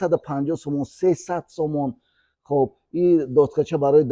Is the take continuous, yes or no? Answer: yes